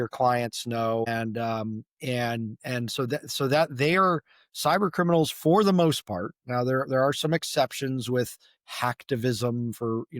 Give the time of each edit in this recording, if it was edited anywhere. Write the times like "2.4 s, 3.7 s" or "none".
1.1 s